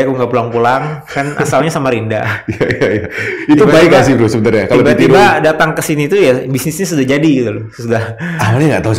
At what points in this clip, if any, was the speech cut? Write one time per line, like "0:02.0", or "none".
none